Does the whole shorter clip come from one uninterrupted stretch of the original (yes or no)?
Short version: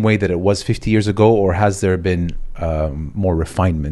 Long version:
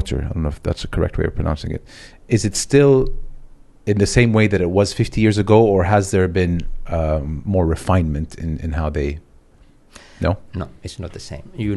yes